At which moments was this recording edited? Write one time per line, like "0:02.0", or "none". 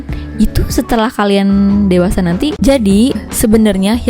0:02.6